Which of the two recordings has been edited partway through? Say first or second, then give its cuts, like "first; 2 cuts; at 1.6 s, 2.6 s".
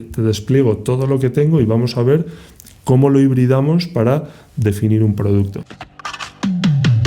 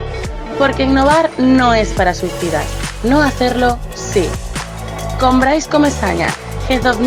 first; 1 cut; at 5.6 s